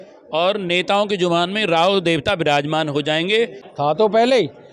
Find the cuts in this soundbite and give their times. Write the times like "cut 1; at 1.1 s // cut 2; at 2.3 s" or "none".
cut 1; at 3.6 s